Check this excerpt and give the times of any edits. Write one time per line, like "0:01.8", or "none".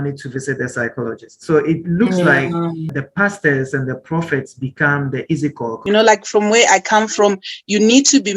0:02.9
0:05.7